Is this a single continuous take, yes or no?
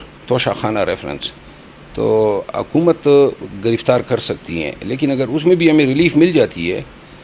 yes